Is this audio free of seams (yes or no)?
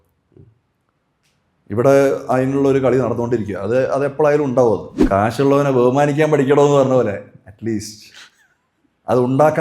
no